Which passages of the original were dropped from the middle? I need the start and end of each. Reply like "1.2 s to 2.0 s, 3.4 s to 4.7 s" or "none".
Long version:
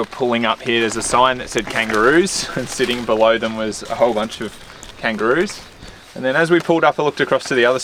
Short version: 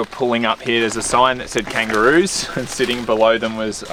none